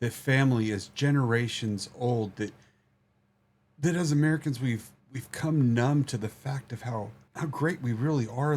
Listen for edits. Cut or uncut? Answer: cut